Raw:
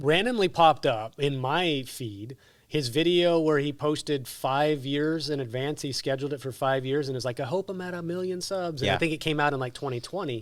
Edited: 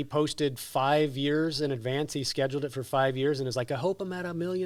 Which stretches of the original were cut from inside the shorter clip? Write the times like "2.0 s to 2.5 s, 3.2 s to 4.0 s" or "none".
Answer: none